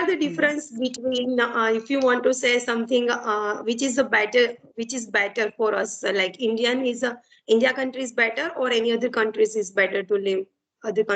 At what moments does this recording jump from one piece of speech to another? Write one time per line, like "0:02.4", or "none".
none